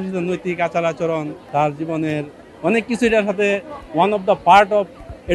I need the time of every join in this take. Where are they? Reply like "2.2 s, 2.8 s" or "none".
1.4 s

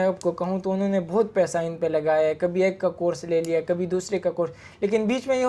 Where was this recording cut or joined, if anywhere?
none

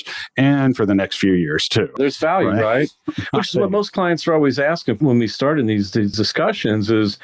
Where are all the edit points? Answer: 1.9 s, 5.0 s, 6.1 s

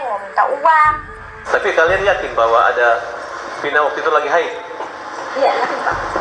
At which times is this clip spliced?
1.4 s

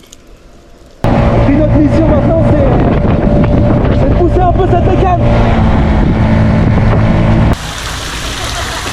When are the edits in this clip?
1.0 s, 7.5 s

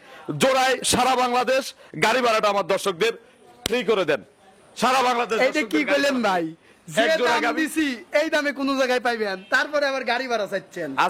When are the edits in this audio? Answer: none

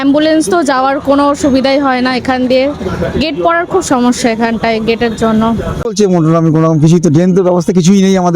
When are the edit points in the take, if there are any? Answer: 5.8 s

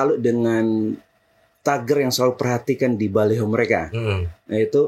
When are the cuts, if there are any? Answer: none

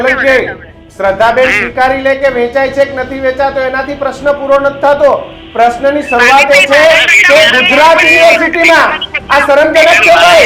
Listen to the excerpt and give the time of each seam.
none

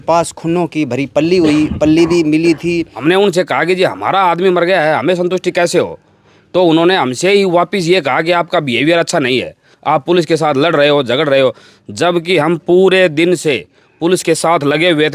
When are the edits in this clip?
2.9 s

